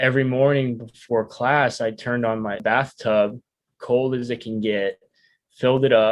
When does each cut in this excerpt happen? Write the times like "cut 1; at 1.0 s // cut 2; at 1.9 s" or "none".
cut 1; at 2.6 s